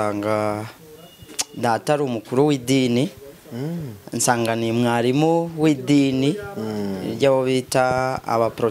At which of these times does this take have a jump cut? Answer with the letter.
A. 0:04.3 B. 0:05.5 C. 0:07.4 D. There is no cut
D